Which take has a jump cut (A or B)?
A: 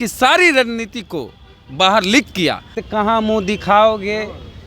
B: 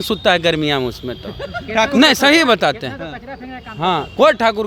A